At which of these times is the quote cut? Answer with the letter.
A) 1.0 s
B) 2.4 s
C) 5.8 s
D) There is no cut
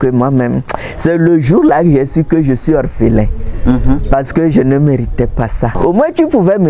C